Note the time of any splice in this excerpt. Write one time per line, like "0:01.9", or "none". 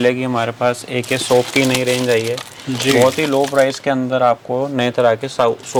none